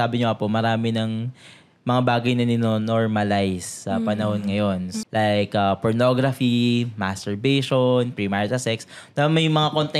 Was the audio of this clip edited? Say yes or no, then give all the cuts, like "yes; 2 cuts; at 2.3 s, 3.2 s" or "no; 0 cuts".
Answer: yes; 1 cut; at 4.9 s